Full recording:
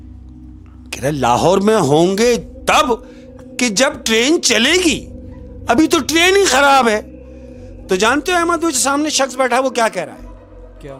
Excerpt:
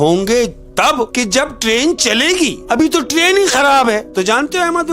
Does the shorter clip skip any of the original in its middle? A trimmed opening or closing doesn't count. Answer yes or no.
yes